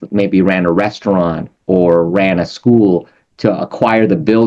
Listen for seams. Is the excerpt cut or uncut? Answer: uncut